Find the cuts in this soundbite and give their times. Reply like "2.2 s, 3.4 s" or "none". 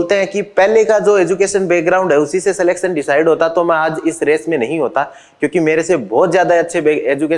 none